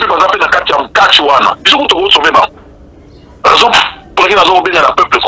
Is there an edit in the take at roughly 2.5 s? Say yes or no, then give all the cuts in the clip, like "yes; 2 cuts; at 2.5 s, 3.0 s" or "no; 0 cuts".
no; 0 cuts